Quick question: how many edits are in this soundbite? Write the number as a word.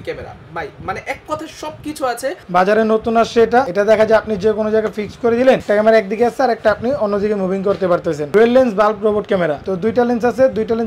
five